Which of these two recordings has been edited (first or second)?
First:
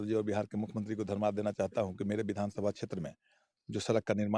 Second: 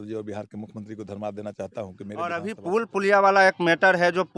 second